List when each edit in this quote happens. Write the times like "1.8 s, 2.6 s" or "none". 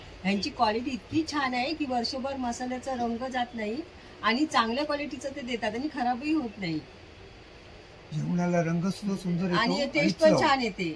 none